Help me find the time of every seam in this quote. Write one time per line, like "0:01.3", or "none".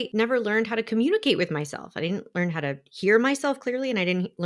none